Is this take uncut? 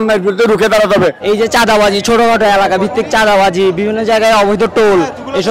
no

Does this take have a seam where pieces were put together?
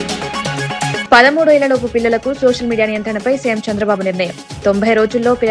yes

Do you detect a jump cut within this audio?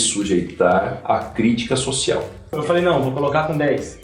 yes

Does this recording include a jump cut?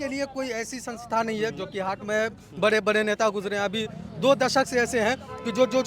no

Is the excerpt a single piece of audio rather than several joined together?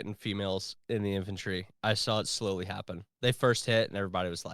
yes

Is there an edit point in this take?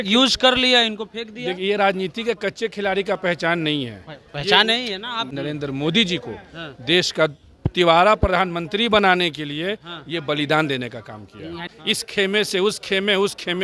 yes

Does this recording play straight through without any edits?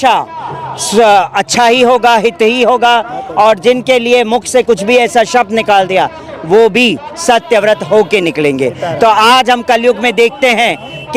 yes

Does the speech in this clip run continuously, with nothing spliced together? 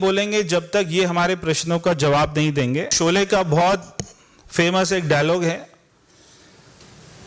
no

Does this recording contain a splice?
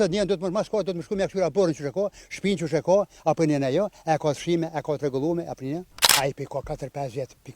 yes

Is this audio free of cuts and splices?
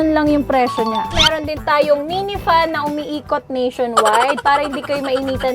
no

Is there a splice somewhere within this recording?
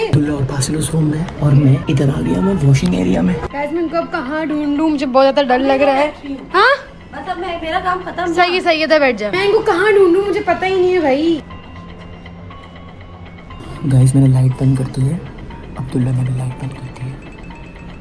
no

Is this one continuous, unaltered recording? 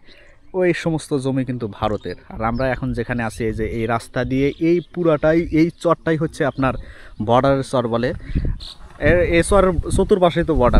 no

